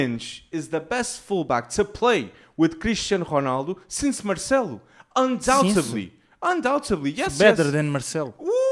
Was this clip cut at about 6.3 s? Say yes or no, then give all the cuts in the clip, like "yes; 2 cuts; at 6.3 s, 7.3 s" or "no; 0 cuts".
no; 0 cuts